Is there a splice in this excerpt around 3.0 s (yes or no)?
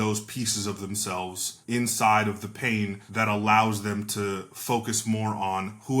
yes